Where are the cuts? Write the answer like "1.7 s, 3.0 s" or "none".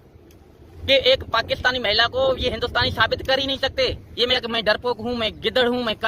4.4 s